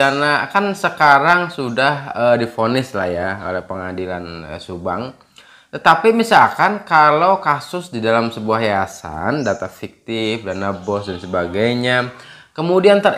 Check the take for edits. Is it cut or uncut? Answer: uncut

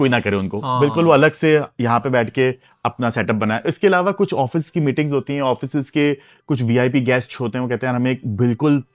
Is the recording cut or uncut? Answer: uncut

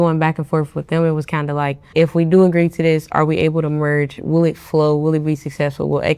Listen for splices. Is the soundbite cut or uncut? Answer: cut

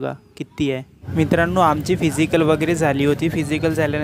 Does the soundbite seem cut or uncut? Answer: cut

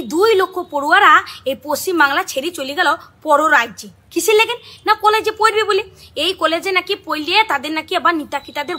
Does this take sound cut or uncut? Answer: cut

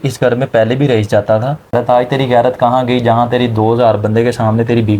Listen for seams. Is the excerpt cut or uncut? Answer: cut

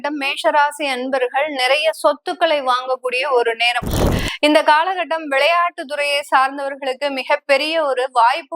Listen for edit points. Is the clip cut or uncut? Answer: cut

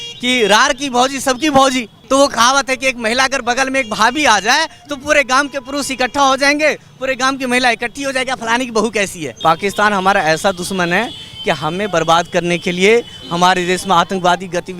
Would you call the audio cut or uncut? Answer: cut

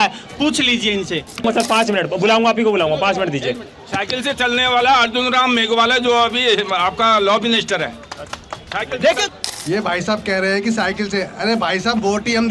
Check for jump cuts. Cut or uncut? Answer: cut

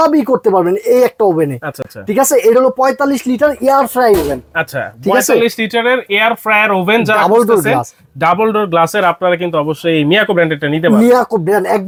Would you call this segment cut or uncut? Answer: uncut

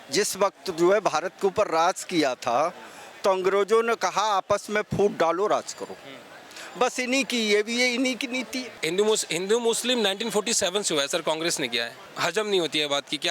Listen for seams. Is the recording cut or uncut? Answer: cut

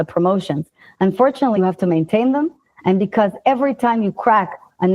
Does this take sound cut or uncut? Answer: cut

